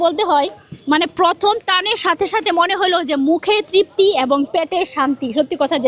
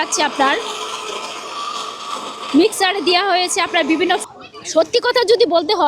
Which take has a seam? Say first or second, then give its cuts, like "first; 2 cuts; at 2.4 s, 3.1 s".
second; 1 cut; at 4.2 s